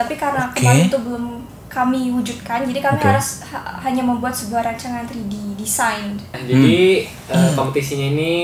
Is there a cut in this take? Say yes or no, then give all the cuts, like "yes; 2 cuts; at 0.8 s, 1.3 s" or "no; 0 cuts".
yes; 1 cut; at 6.2 s